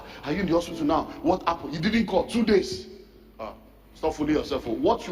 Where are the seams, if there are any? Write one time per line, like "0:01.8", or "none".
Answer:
none